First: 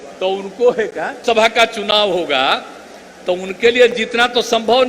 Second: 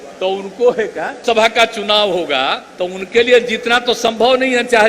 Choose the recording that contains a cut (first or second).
second